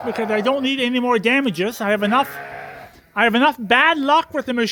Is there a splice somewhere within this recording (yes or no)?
no